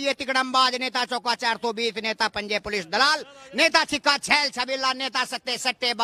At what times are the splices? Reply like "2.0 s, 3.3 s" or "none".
none